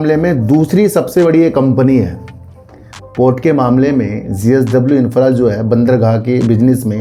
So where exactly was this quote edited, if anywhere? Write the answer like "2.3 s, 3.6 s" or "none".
none